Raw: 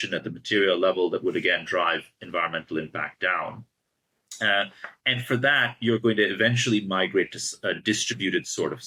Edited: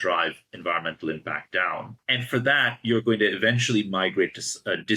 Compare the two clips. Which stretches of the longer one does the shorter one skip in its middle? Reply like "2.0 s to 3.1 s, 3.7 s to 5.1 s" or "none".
3.6 s to 4.9 s